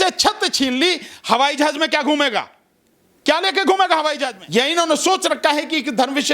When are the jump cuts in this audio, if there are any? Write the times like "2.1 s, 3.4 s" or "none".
4.3 s